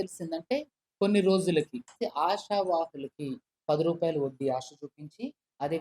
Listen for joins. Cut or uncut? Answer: cut